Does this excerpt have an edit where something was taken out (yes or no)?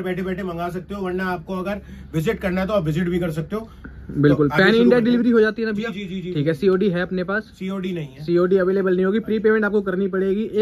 no